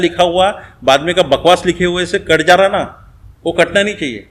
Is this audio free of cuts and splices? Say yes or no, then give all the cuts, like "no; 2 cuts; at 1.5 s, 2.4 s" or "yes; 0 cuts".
yes; 0 cuts